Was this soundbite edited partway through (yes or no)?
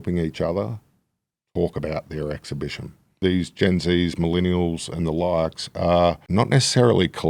yes